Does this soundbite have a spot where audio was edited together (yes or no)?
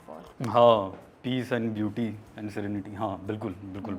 no